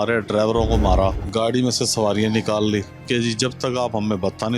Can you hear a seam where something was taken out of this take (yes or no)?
yes